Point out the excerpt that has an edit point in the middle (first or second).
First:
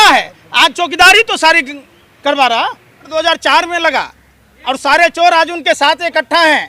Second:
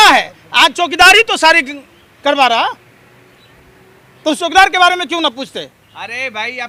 first